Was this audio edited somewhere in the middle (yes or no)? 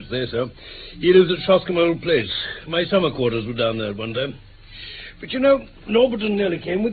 no